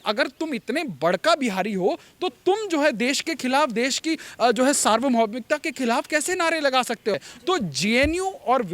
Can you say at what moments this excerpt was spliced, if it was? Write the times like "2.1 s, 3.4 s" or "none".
7.3 s